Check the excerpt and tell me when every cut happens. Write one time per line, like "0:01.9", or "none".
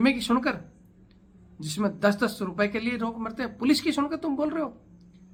none